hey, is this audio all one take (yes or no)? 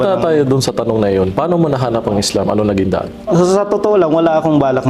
yes